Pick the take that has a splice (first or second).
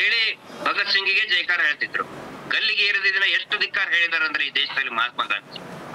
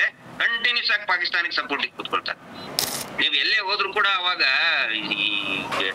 second